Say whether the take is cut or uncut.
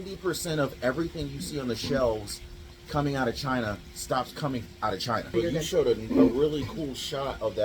cut